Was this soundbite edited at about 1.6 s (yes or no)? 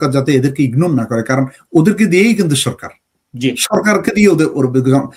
no